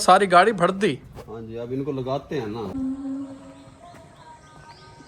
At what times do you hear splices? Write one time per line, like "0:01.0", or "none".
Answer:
0:02.7